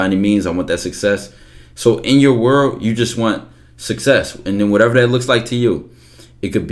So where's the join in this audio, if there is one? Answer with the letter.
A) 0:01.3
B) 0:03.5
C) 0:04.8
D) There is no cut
D